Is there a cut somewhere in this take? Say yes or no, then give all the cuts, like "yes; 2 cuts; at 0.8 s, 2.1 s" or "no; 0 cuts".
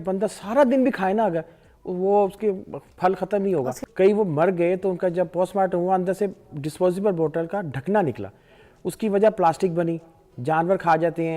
yes; 1 cut; at 3.8 s